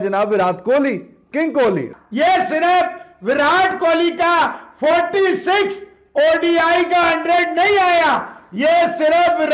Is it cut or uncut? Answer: cut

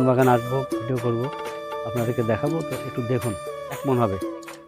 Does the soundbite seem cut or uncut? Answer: cut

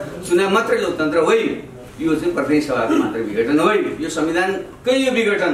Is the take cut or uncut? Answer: cut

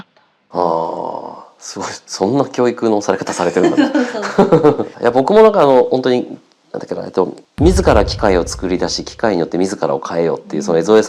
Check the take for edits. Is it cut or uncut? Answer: cut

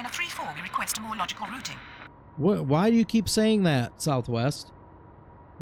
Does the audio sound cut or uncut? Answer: uncut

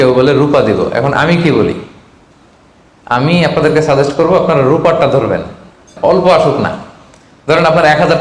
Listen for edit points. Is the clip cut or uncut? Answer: cut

